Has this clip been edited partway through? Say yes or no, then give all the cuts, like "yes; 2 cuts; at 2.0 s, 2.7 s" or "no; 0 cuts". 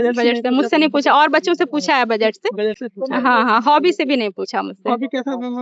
no; 0 cuts